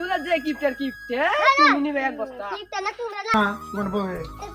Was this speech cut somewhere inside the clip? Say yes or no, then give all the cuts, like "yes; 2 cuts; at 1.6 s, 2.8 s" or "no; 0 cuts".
yes; 1 cut; at 3.3 s